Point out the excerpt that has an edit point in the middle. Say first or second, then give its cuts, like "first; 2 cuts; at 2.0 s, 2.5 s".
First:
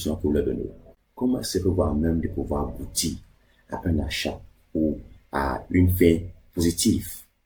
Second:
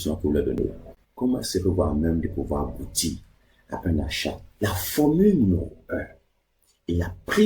second; 1 cut; at 4.5 s